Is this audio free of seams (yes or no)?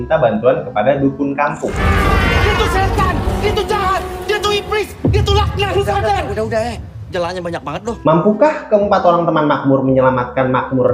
yes